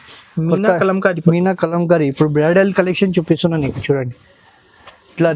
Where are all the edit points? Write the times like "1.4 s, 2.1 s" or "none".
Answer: none

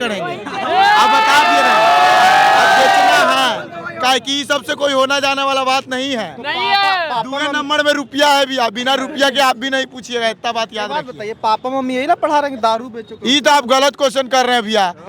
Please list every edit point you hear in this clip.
none

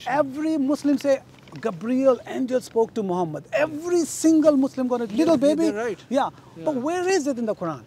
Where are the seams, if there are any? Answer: none

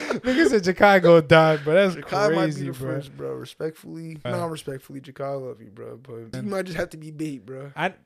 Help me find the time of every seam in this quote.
4.2 s, 6.3 s

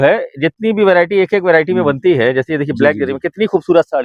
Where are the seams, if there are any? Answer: none

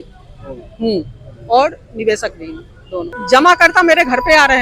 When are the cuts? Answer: 3.2 s

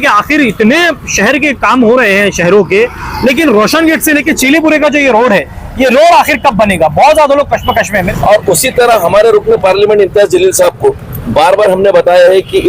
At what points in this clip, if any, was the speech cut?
8.1 s

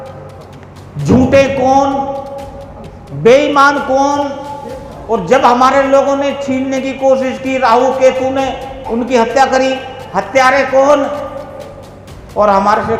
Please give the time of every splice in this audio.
none

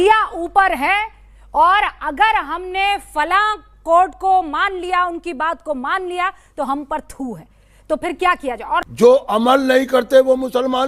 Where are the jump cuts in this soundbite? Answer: 8.9 s

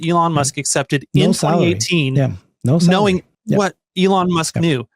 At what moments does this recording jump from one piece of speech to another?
3.4 s

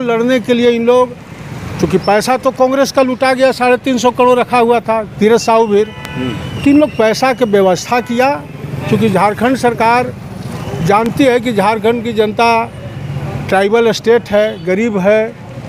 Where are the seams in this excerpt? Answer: none

